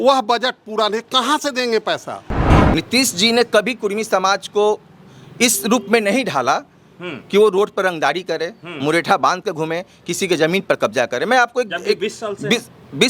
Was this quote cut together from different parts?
yes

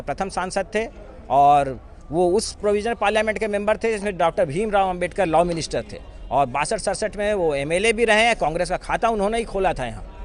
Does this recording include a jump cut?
no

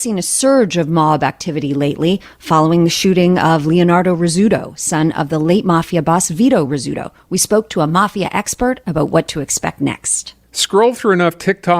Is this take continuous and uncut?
no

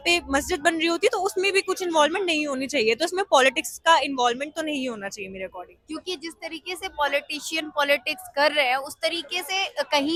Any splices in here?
no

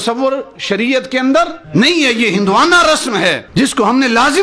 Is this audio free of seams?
yes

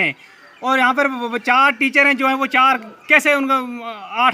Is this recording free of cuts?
yes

